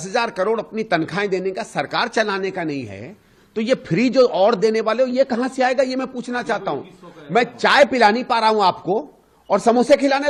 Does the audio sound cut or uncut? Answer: uncut